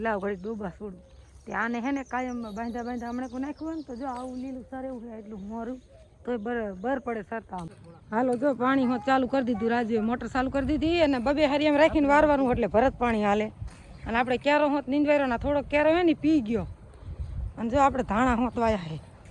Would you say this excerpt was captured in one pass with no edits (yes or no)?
no